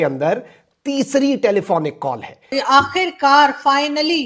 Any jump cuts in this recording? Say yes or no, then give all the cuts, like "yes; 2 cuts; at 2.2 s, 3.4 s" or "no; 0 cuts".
yes; 1 cut; at 2.5 s